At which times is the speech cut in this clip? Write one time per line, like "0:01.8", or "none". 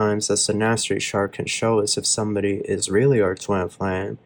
none